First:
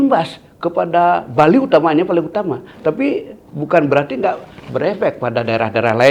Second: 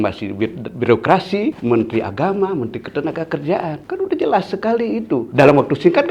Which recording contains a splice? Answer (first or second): second